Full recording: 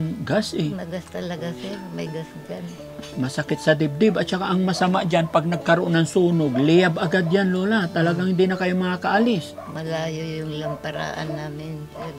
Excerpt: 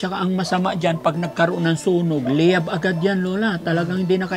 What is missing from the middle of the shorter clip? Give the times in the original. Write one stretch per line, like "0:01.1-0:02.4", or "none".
none

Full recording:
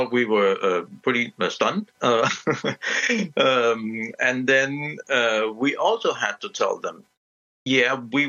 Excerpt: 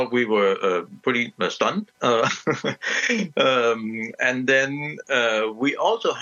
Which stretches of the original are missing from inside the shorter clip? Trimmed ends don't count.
none

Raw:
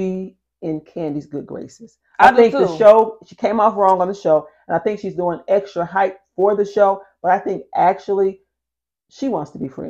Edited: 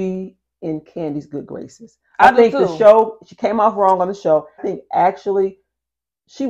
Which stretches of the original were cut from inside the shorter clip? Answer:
0:04.6-0:07.4

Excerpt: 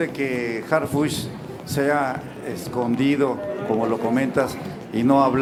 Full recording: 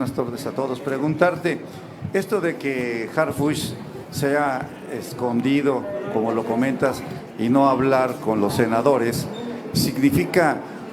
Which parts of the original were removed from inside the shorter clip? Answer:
none

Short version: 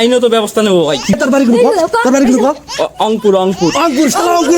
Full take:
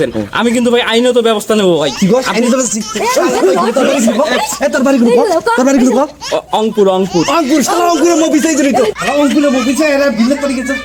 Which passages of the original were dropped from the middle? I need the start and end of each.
0:02.1-0:04.7

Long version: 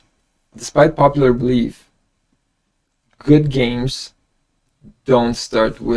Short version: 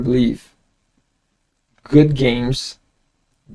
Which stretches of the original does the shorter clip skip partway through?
none

